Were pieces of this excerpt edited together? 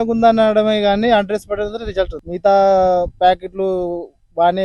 yes; 1 cut; at 2.2 s

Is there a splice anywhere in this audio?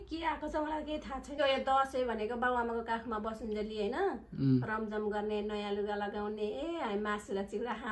yes; 1 cut; at 1.3 s

